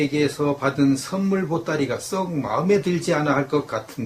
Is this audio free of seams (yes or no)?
no